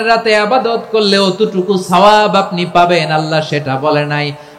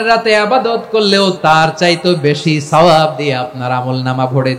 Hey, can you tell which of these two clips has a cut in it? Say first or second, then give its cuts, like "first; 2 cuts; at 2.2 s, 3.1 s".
second; 1 cut; at 1.4 s